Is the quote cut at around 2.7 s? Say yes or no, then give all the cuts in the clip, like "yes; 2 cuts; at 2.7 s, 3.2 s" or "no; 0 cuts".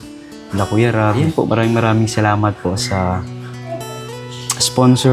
no; 1 cut; at 1.2 s